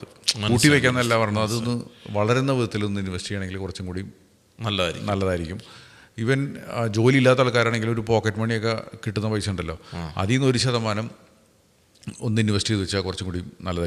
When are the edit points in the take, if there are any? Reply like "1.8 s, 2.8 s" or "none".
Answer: none